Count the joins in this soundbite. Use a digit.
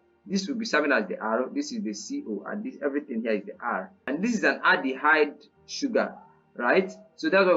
1